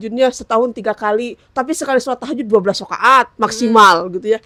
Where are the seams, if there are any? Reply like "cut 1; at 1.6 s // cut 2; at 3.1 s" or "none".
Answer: none

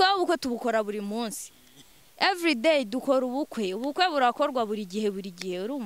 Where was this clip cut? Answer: none

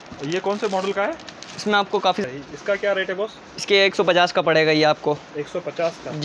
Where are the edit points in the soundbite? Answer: cut 1; at 2.2 s

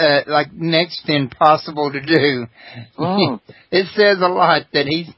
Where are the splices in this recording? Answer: none

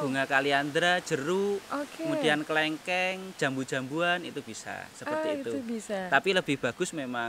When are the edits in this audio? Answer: none

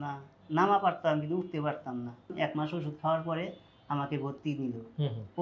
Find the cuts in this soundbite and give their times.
cut 1; at 2.3 s

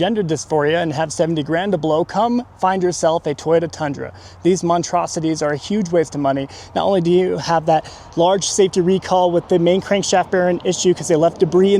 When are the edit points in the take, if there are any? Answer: none

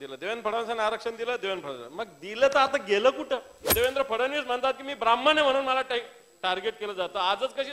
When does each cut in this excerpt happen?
cut 1; at 3.7 s

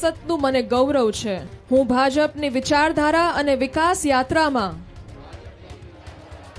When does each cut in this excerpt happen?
cut 1; at 1.5 s

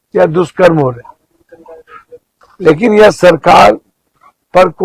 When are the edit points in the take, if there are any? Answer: none

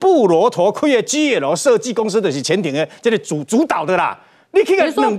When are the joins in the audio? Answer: none

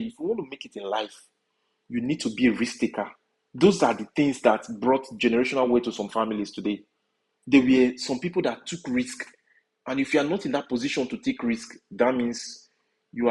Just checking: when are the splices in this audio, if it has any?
none

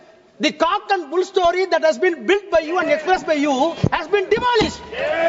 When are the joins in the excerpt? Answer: none

